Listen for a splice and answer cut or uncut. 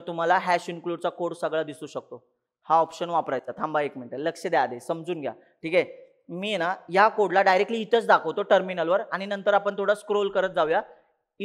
uncut